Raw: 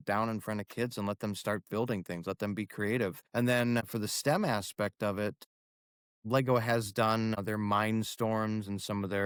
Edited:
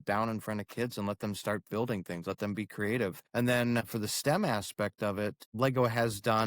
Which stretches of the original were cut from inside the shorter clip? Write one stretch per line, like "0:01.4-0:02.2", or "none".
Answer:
0:05.4-0:06.1